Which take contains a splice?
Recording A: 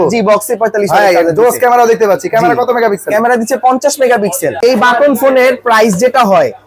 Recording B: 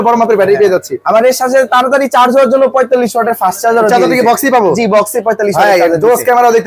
A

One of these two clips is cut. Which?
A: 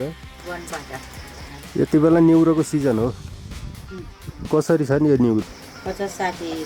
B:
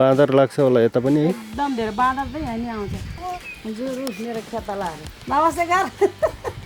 B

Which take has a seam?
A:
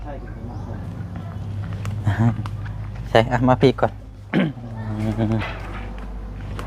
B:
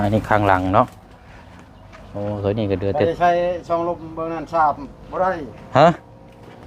A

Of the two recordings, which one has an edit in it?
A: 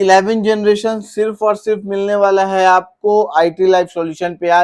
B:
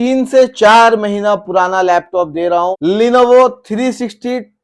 B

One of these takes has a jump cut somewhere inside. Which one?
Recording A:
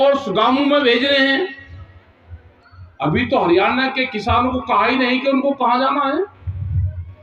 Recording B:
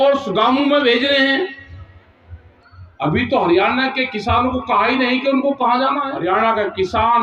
B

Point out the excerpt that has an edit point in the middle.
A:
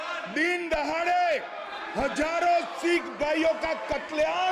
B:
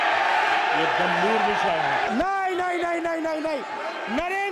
B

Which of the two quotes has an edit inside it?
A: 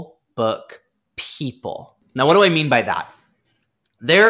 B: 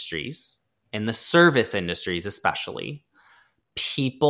A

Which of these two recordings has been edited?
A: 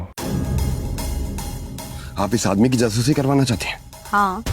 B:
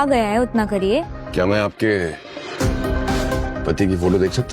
B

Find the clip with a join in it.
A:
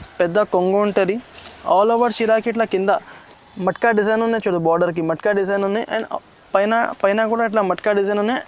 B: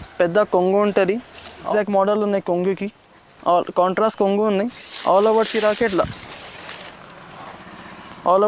B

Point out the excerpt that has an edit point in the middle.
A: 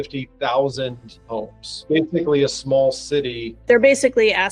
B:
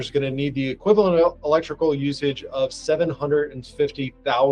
A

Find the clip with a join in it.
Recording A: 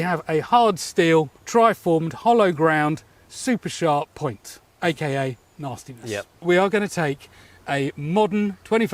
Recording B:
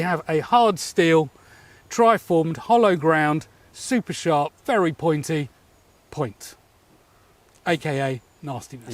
A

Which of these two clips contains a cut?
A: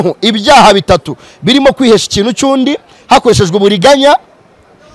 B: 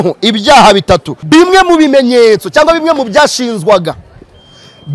B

